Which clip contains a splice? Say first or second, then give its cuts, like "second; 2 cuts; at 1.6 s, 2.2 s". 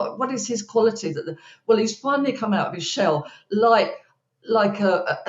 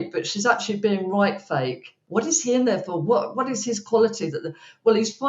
second; 1 cut; at 1.9 s